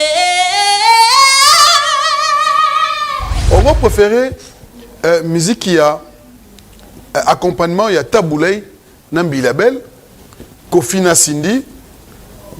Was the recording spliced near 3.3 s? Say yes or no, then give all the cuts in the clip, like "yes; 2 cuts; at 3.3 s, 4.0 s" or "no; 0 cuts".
yes; 1 cut; at 3.3 s